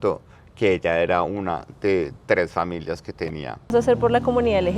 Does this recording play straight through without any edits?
no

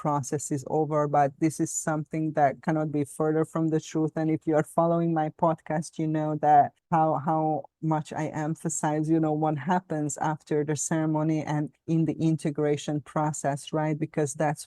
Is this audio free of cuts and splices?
yes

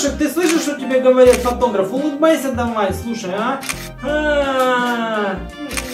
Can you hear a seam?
no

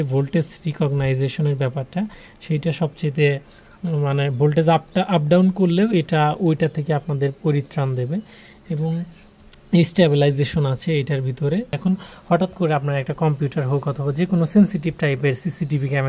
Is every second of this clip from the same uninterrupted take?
no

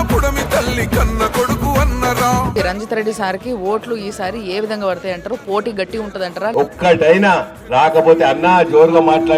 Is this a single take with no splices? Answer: no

